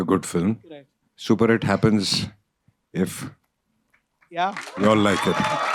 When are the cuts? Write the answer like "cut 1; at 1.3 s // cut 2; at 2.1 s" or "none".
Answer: none

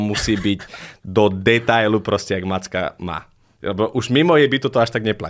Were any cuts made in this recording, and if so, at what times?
none

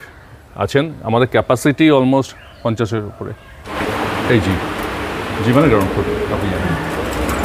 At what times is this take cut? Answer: cut 1; at 3.7 s

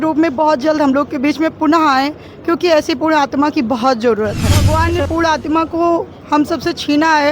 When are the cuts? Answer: cut 1; at 4.6 s

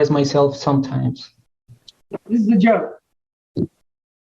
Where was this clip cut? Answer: cut 1; at 2.1 s

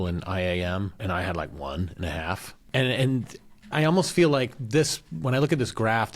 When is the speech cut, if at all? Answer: cut 1; at 1.0 s // cut 2; at 2.5 s // cut 3; at 3.6 s

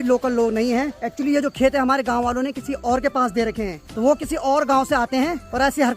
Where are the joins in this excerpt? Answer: none

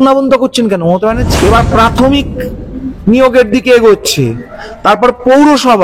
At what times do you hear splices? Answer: cut 1; at 1.3 s

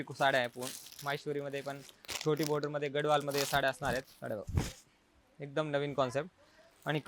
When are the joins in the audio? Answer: cut 1; at 4.1 s

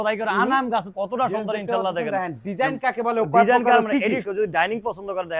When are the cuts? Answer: cut 1; at 0.9 s // cut 2; at 4.2 s

